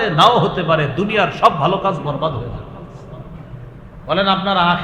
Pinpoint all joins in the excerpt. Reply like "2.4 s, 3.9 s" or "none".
none